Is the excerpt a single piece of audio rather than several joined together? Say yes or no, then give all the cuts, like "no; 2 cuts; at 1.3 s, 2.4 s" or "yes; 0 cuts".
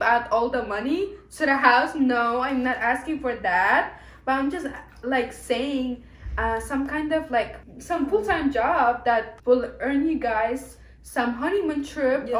yes; 0 cuts